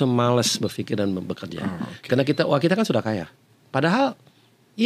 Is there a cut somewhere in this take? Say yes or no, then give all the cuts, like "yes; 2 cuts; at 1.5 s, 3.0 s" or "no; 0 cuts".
no; 0 cuts